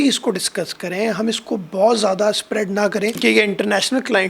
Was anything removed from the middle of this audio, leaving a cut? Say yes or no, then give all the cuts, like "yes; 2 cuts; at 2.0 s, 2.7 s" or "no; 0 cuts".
yes; 1 cut; at 3.2 s